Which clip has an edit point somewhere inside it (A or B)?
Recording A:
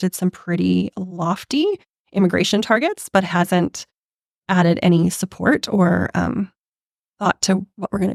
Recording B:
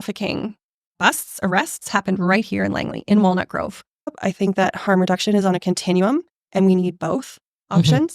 B